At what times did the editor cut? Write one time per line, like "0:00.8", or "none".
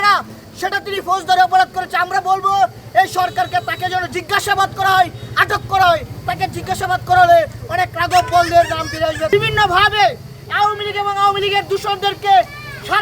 0:09.3